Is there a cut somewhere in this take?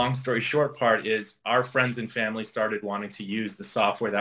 yes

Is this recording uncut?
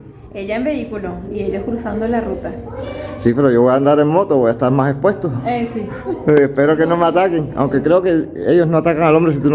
yes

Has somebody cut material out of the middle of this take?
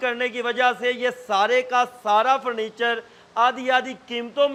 no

